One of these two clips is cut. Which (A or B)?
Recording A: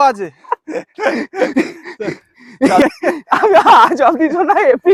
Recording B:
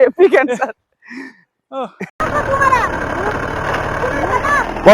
B